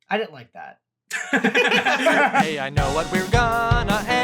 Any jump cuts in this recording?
yes; 1 cut; at 2.4 s

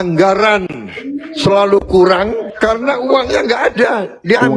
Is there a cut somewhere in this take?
no; 0 cuts

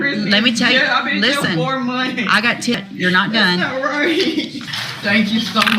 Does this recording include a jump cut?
yes; 2 cuts; at 2.7 s, 4.6 s

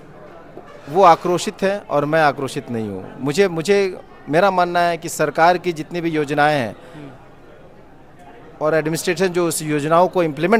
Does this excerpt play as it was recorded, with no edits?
yes; 0 cuts

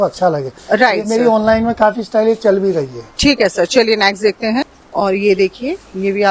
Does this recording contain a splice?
yes; 1 cut; at 4.7 s

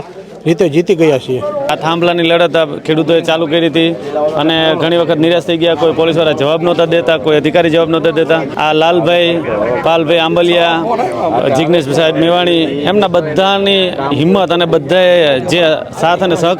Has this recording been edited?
yes; 2 cuts; at 1.6 s, 8.5 s

